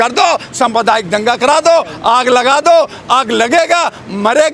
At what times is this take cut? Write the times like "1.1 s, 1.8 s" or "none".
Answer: none

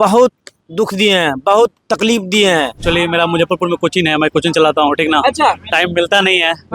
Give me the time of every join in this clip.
2.8 s

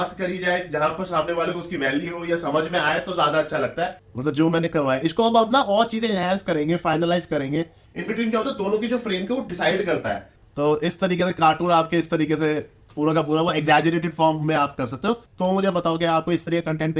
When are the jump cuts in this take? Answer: 4.0 s, 7.8 s, 10.4 s, 15.3 s

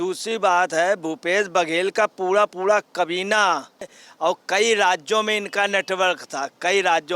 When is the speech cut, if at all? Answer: 4.0 s

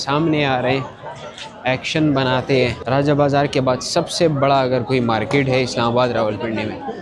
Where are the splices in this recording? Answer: 2.8 s

